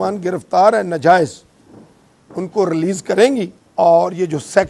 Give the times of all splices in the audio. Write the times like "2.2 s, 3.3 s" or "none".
3.6 s